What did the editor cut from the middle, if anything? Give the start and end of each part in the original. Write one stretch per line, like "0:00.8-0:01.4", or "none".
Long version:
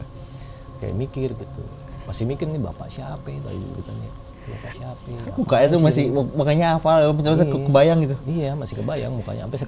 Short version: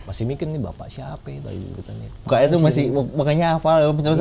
0:04.3-0:05.5